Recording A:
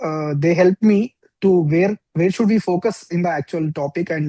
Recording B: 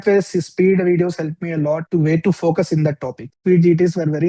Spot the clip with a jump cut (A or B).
B